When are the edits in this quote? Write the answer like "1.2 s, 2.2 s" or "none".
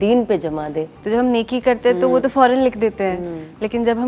0.9 s